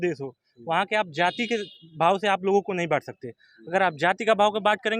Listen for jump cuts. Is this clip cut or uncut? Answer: uncut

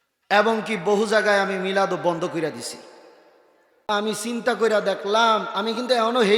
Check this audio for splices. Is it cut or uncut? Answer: cut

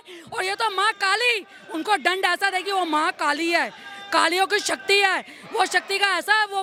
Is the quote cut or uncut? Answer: uncut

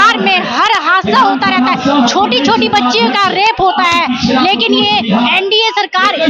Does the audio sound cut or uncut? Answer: uncut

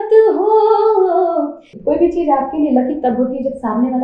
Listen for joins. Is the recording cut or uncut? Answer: cut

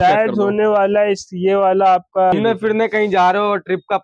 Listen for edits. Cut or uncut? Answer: cut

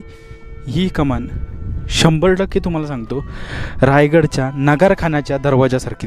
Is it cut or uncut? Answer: uncut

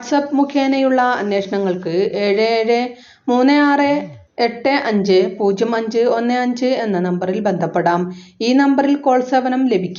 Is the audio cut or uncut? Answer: cut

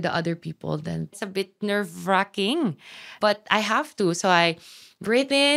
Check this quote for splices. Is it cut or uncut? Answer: cut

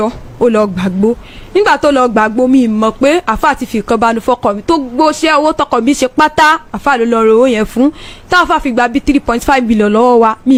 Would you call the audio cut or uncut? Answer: uncut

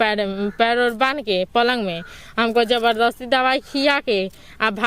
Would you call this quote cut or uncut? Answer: uncut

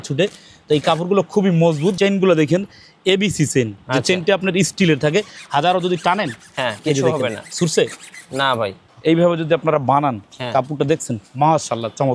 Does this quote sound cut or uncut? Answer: cut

